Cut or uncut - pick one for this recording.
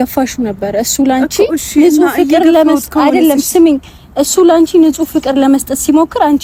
uncut